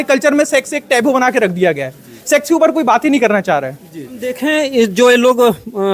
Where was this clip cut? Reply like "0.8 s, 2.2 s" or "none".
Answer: 4.3 s